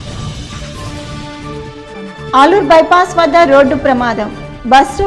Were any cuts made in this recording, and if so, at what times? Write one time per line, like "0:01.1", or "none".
none